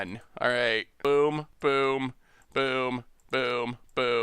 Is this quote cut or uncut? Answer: cut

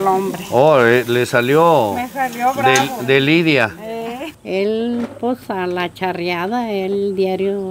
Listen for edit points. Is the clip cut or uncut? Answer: cut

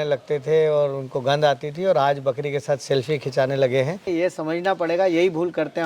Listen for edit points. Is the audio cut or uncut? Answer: cut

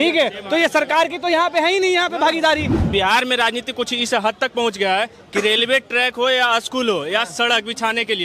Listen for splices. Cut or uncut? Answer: cut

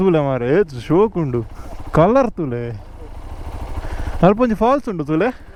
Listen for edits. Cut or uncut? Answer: uncut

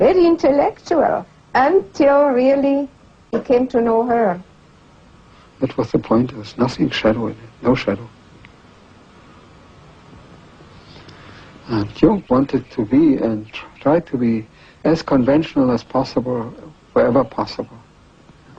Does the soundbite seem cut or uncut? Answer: cut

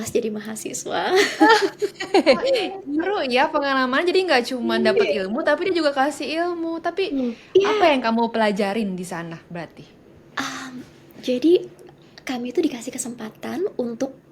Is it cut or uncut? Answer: uncut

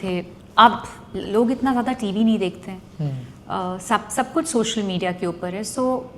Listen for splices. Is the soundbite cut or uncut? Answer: uncut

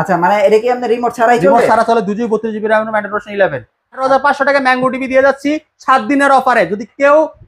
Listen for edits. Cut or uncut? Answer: cut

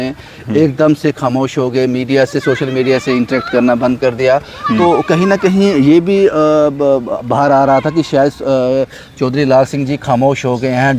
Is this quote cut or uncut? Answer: uncut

